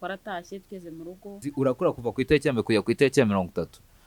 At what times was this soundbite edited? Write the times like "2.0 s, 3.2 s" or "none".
1.5 s

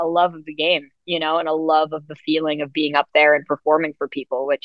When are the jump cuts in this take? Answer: none

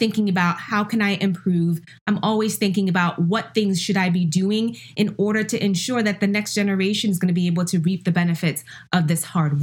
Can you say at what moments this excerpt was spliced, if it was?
none

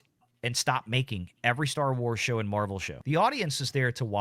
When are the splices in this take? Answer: 2.9 s

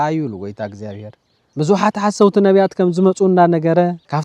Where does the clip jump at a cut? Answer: 1.5 s

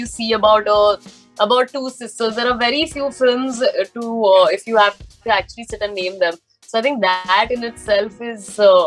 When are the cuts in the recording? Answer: none

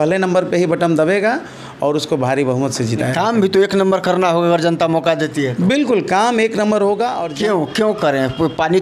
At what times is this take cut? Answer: 7.2 s

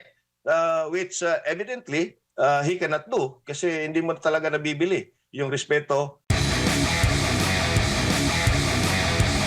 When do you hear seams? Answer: 6.2 s

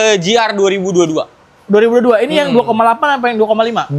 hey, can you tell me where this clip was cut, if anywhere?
none

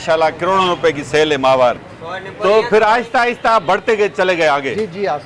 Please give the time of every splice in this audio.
1.9 s

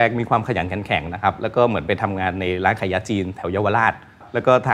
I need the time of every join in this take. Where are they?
none

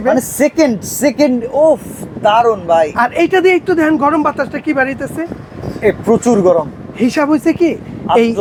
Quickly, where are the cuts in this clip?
none

